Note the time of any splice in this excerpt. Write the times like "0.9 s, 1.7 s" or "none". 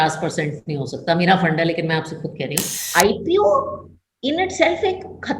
2.7 s